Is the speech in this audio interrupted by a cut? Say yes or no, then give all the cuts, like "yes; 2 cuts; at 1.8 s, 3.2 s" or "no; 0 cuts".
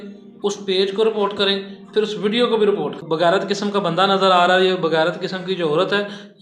yes; 1 cut; at 3.0 s